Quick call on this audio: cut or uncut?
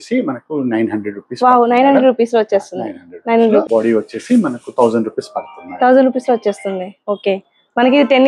uncut